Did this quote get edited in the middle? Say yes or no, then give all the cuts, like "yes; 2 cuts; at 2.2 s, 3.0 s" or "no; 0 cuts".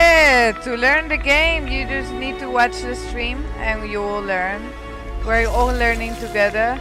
no; 0 cuts